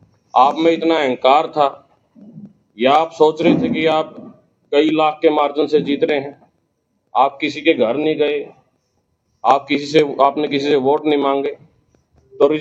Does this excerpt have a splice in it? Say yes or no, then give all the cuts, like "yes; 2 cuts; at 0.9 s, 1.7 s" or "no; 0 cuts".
no; 0 cuts